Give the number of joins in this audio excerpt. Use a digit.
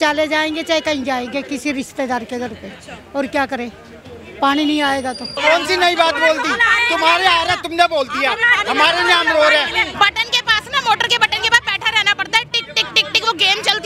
2